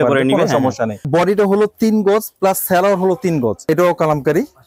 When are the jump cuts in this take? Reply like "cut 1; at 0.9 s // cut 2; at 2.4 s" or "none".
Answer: cut 1; at 1.1 s // cut 2; at 3.6 s